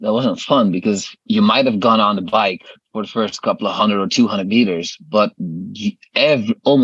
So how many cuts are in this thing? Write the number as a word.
one